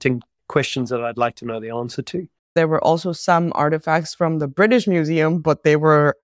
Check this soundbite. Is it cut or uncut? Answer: cut